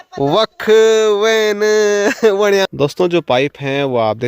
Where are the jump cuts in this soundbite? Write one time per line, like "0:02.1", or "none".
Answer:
0:02.7

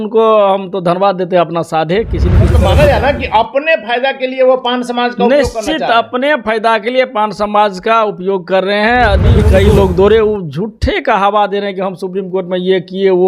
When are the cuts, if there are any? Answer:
0:02.5
0:09.4

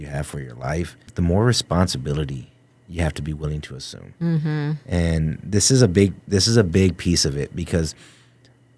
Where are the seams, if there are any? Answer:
0:01.1

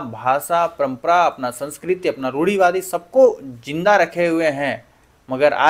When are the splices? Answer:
none

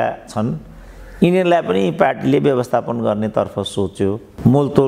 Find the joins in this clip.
none

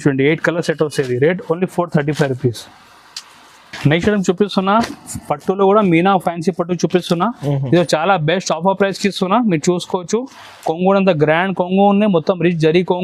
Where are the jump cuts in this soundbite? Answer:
none

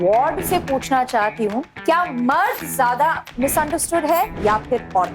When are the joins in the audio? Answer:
0:01.7
0:04.3

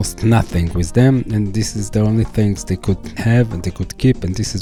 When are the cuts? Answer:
none

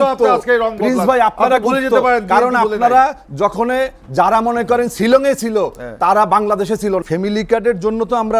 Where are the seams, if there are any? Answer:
0:07.0

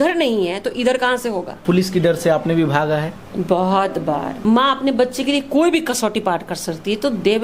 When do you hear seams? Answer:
0:01.6
0:04.3

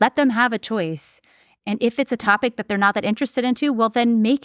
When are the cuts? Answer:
0:01.6

